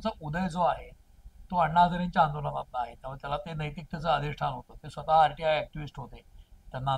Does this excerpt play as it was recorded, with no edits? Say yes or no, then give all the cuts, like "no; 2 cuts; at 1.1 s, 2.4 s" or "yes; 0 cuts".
yes; 0 cuts